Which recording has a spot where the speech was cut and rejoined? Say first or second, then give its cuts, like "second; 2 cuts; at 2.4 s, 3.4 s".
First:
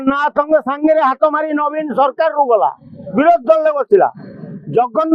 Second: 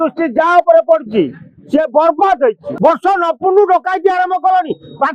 second; 1 cut; at 2.7 s